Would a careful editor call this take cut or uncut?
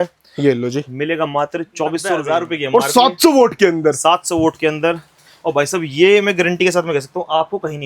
cut